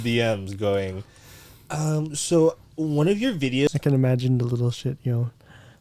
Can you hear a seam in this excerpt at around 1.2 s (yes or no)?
no